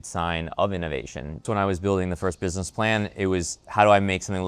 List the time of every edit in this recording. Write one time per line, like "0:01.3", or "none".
0:01.4